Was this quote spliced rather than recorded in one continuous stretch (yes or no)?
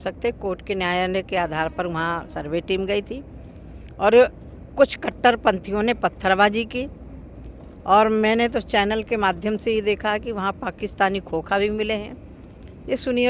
no